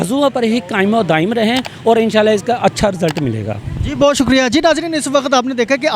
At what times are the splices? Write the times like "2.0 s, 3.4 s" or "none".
none